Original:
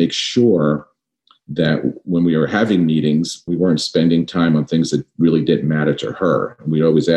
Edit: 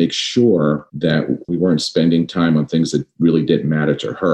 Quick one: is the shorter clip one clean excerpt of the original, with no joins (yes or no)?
no